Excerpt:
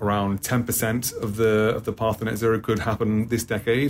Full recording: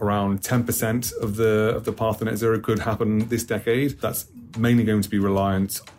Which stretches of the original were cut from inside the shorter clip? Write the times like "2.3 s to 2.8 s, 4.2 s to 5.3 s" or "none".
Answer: none